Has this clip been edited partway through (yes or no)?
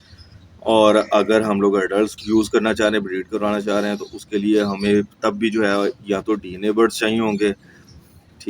yes